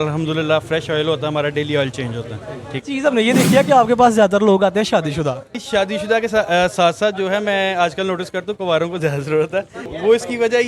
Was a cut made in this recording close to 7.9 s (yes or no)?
no